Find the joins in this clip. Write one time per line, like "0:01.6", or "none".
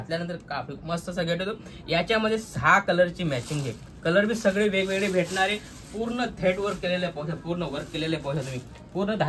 none